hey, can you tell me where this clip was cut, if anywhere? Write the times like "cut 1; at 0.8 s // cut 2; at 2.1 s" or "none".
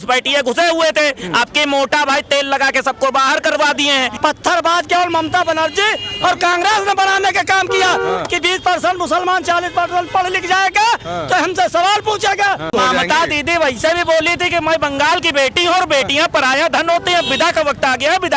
cut 1; at 4.1 s // cut 2; at 12.7 s